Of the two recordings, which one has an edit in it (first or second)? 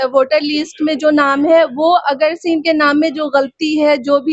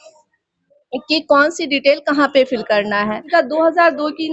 second